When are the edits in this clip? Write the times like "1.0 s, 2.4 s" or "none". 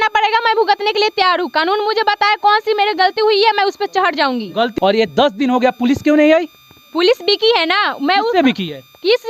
4.7 s